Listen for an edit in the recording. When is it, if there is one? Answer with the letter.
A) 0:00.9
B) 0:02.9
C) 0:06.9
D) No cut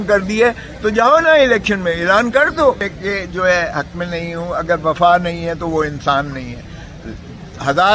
B